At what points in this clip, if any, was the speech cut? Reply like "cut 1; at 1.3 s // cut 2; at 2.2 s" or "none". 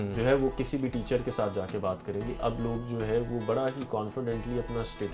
cut 1; at 2.4 s